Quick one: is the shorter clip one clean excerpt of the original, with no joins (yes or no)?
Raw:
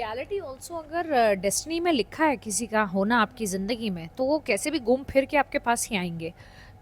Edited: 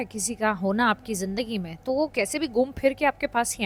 yes